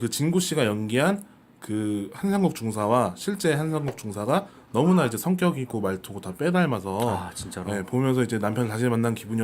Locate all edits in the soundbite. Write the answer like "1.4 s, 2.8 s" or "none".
3.3 s